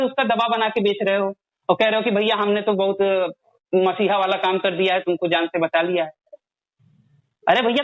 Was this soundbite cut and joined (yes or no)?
no